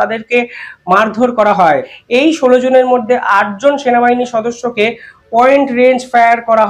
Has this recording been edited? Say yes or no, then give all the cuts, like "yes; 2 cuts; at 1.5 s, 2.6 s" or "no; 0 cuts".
yes; 1 cut; at 1.9 s